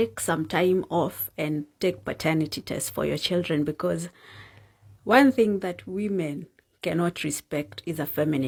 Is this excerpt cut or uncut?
uncut